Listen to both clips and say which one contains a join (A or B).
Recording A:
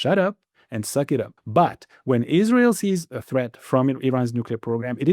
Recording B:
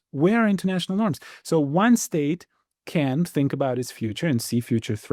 A